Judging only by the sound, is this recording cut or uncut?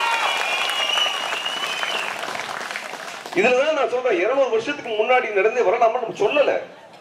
uncut